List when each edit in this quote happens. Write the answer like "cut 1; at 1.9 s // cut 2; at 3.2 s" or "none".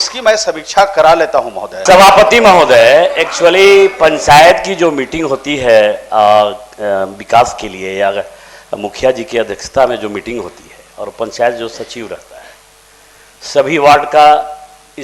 cut 1; at 1.8 s

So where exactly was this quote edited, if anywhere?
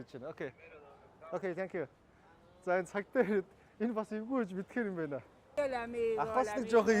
cut 1; at 5.5 s

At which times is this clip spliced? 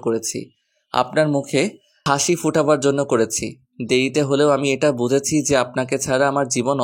cut 1; at 1.9 s

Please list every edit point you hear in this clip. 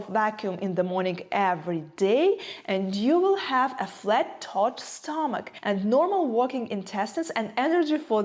cut 1; at 5.5 s

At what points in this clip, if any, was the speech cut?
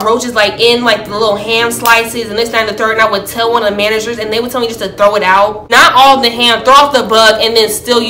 none

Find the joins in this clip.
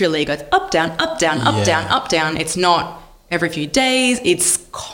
none

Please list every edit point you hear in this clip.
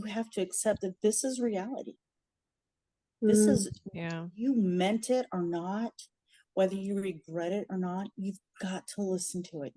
none

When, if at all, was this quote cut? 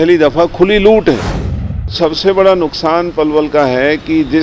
cut 1; at 1.9 s

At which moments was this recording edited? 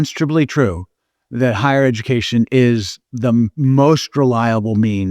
cut 1; at 3.3 s

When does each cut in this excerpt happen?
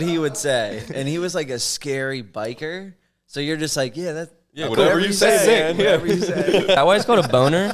cut 1; at 6.8 s

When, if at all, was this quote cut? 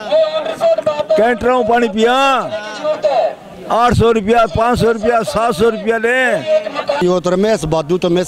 cut 1; at 7.0 s

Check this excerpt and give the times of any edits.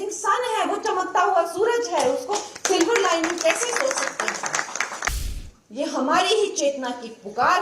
cut 1; at 5.2 s

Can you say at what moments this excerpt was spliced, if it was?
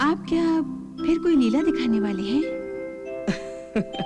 none

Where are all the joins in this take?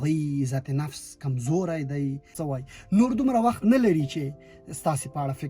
cut 1; at 2.3 s

